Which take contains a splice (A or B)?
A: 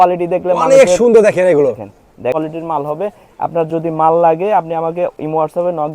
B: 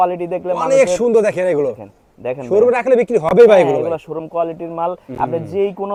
A